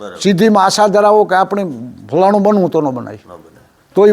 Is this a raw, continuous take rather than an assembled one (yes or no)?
yes